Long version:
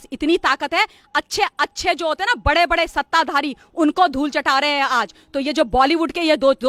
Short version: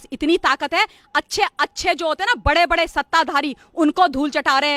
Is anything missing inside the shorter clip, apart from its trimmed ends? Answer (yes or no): no